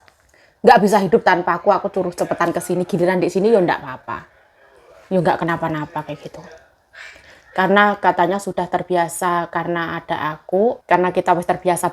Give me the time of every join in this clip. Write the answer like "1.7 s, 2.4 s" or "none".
10.8 s